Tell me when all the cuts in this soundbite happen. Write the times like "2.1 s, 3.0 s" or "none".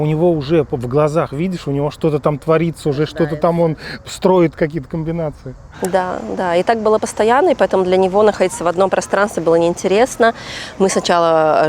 none